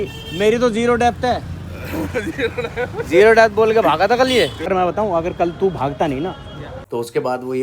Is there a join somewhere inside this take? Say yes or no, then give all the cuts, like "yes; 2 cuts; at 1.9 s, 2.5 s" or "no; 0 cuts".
yes; 2 cuts; at 4.6 s, 6.7 s